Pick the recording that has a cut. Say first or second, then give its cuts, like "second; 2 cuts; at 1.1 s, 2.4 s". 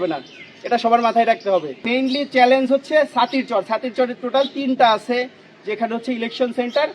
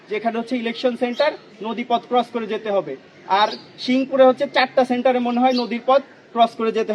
first; 1 cut; at 1.9 s